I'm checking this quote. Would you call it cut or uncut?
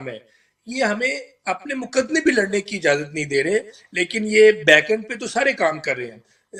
uncut